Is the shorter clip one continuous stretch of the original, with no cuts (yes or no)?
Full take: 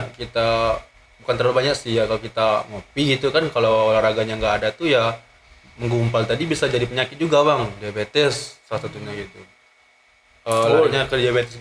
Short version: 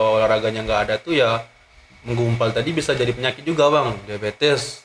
yes